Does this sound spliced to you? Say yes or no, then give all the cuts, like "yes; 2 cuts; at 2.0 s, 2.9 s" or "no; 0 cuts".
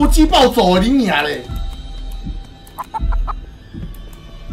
no; 0 cuts